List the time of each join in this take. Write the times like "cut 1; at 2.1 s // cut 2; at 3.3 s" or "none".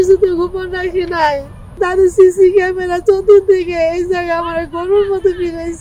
cut 1; at 1.8 s